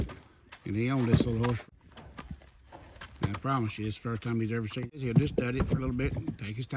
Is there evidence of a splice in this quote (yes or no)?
yes